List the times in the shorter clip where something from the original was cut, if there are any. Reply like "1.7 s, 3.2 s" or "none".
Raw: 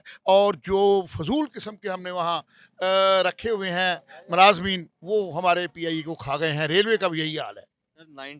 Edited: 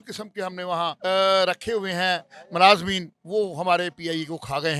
1.0 s

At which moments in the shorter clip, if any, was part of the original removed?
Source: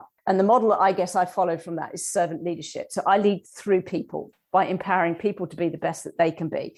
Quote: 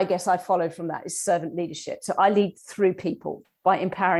none

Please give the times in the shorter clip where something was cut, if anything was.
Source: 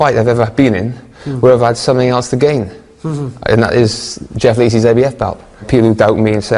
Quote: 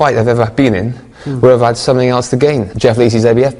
2.7 s

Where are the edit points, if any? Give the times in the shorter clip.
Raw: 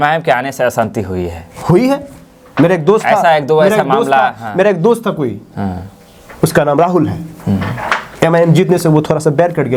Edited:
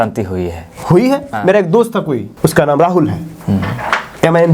1.3 s, 2.3 s

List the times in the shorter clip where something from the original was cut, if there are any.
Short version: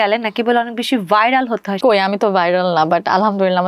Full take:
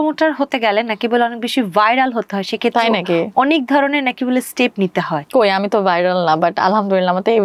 1.7 s

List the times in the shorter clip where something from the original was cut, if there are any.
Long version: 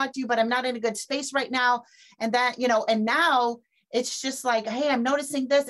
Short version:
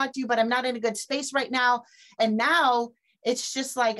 2.2 s

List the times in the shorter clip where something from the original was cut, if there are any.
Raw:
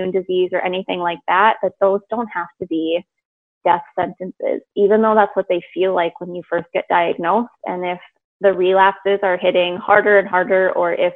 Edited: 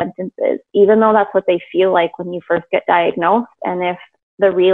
none

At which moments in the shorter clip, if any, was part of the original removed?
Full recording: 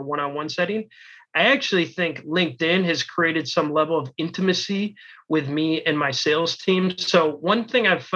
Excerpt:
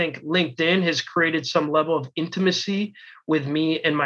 none

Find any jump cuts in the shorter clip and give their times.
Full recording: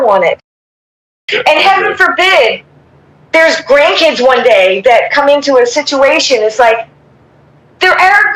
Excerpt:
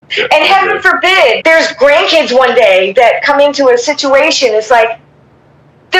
1.4 s

